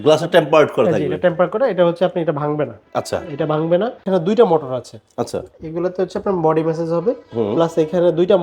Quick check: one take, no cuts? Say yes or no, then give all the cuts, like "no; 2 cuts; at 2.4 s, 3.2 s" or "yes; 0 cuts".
no; 1 cut; at 4.0 s